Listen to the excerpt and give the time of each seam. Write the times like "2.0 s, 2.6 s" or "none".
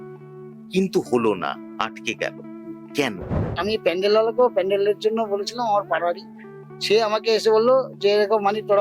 3.6 s

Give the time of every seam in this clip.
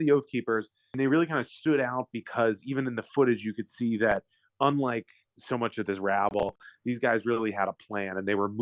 1.0 s

